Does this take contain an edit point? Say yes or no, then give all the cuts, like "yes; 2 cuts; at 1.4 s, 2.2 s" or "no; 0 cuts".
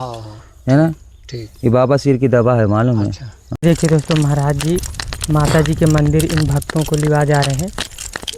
yes; 1 cut; at 3.6 s